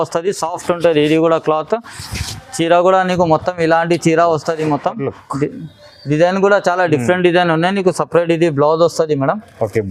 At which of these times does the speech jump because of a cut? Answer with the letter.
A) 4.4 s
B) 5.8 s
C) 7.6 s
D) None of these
D